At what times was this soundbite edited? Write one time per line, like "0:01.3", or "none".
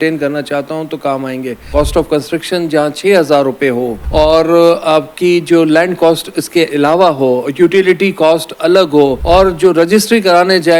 0:01.7
0:04.0
0:09.2